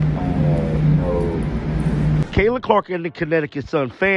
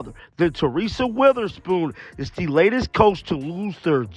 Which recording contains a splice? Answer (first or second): first